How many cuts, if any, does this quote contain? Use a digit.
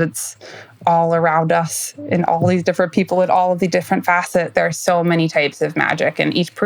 1